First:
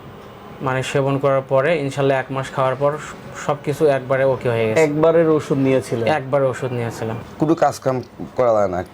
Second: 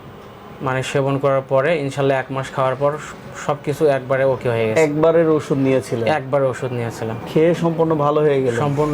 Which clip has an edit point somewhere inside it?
first; 1 cut; at 7.1 s

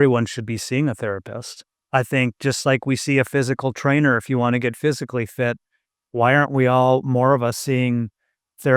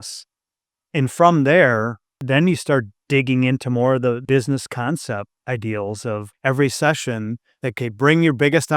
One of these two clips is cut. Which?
second; 6 cuts; at 2.2 s, 3.0 s, 4.2 s, 5.3 s, 6.3 s, 7.8 s

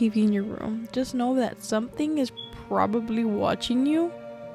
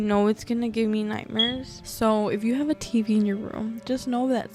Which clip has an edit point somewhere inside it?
second; 1 cut; at 1.7 s

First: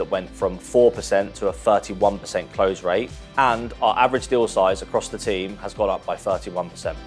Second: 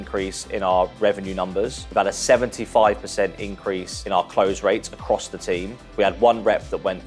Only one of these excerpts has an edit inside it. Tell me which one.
second; 3 cuts; at 1.8 s, 3.9 s, 5.8 s

